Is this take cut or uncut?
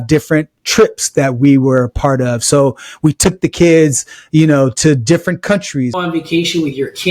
cut